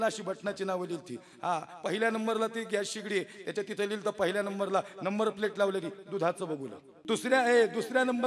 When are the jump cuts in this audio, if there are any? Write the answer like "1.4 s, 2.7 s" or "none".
6.9 s